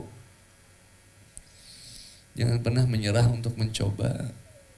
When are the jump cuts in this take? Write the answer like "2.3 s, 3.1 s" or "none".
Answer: 1.3 s